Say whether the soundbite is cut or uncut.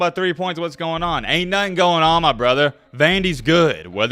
uncut